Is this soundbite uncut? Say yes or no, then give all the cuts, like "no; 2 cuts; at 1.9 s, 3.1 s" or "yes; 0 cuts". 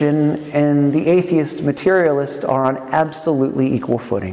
yes; 0 cuts